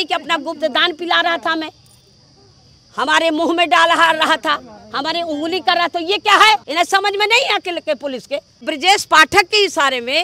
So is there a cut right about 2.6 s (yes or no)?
no